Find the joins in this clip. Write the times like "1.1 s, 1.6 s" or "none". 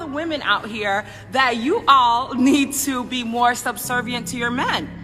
3.4 s